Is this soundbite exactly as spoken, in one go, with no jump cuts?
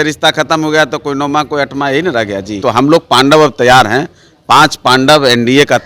no; 1 cut; at 2.6 s

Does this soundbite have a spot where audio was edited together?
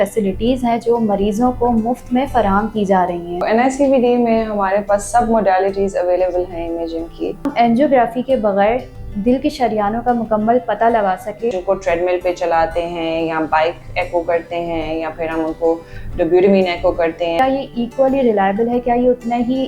yes; 4 cuts; at 3.4 s, 7.5 s, 11.6 s, 17.4 s

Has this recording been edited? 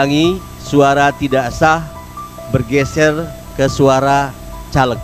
no; 0 cuts

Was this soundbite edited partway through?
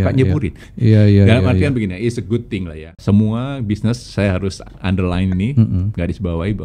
yes; 1 cut; at 2.9 s

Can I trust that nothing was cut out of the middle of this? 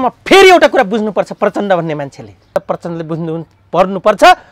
no; 1 cut; at 2.6 s

